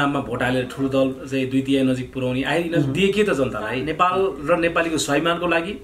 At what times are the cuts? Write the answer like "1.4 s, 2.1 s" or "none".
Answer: 3.8 s